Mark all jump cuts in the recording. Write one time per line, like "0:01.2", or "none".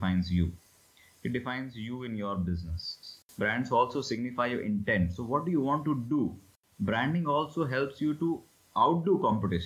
0:03.0
0:06.4

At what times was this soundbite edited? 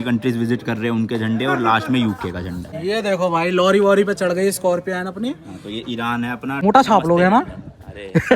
0:02.7
0:06.6

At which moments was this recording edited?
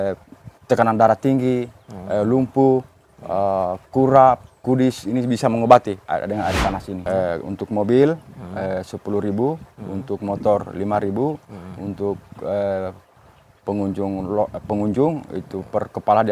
0:06.9

